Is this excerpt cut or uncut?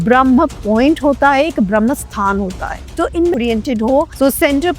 cut